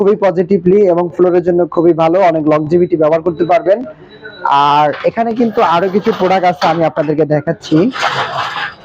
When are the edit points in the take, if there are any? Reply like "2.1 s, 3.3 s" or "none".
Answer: none